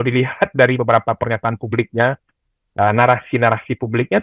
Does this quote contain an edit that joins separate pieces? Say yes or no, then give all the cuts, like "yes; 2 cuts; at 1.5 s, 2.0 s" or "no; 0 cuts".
no; 0 cuts